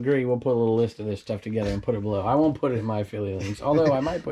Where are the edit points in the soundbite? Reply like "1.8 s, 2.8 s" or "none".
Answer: none

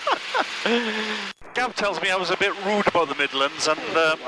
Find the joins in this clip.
1.5 s

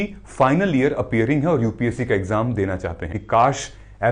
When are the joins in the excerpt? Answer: 3.2 s

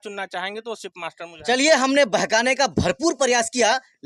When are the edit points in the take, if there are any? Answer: none

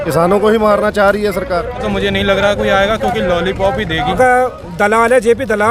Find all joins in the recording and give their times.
1.8 s, 4.1 s

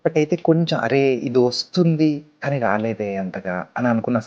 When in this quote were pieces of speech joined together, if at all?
none

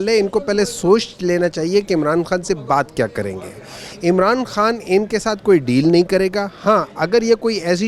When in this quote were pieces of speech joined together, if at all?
none

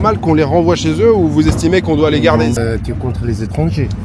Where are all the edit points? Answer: 2.6 s

